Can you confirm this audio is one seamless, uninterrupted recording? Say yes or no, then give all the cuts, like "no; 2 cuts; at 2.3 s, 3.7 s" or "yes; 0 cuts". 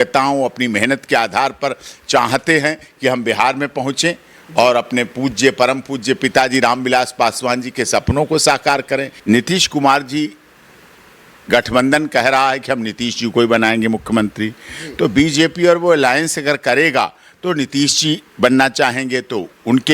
no; 1 cut; at 9.1 s